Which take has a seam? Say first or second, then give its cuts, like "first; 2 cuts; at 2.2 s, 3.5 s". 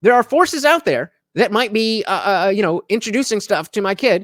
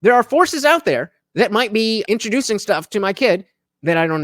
second; 1 cut; at 2.0 s